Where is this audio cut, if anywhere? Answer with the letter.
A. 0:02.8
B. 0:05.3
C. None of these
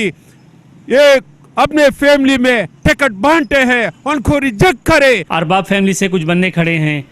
B